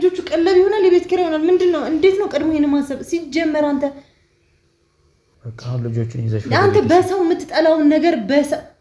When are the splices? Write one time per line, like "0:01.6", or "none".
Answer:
0:05.3